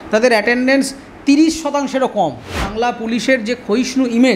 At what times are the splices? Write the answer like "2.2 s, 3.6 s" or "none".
2.7 s